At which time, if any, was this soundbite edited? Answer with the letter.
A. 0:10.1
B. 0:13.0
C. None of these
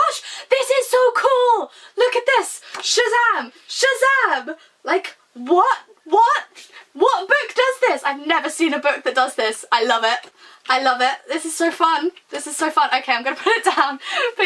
C